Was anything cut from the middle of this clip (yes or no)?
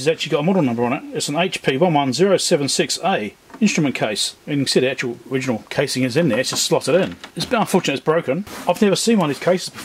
yes